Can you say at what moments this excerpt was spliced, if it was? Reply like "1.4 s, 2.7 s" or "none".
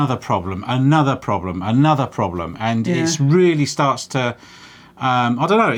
none